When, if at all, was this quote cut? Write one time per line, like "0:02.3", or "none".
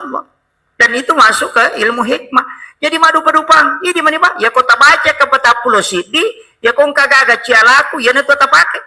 none